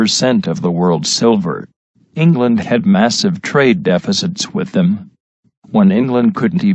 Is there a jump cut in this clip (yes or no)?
yes